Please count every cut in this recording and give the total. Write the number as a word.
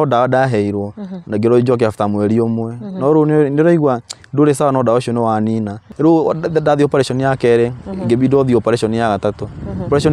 one